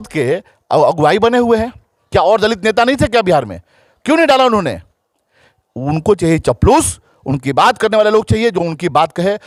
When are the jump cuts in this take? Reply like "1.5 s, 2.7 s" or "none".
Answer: none